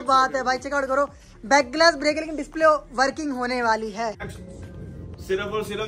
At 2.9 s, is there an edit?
no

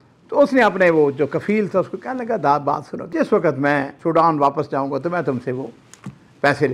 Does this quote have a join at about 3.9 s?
yes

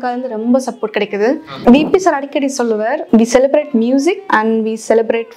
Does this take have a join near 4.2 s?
yes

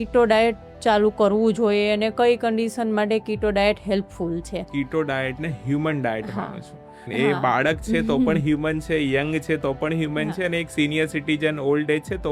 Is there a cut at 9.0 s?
no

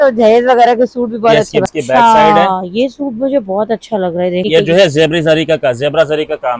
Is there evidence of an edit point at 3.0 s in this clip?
no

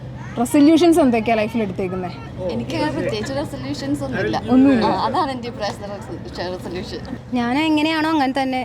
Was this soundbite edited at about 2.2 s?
yes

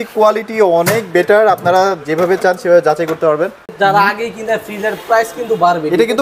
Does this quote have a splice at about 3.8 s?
yes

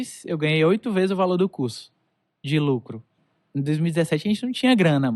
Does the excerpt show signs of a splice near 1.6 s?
no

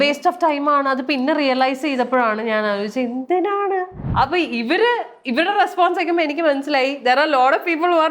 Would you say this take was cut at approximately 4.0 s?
yes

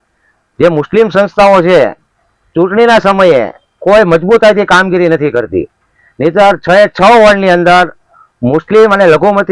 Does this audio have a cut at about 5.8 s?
no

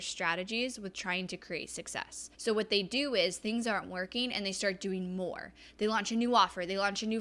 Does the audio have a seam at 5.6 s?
no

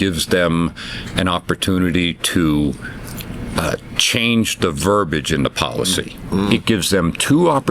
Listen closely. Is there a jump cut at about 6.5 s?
yes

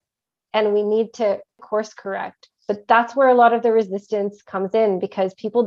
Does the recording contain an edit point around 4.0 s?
no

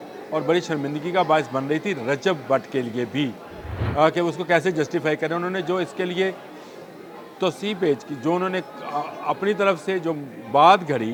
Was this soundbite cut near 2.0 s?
no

